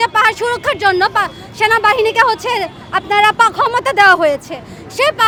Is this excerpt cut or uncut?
uncut